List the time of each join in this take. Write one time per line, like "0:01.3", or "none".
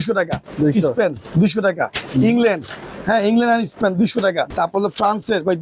0:04.5